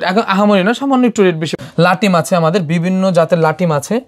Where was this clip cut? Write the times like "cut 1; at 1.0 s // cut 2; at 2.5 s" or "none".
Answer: cut 1; at 1.5 s